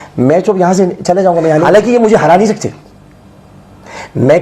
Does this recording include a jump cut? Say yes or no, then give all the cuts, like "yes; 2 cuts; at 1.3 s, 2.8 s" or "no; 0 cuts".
yes; 1 cut; at 1.6 s